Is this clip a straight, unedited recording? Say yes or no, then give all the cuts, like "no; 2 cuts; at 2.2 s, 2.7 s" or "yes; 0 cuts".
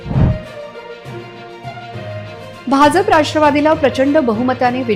yes; 0 cuts